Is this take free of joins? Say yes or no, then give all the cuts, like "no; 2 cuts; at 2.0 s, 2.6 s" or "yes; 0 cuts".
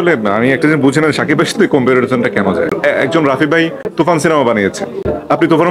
no; 2 cuts; at 2.8 s, 3.8 s